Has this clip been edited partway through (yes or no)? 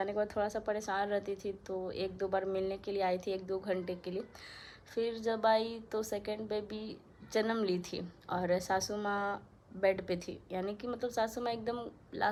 no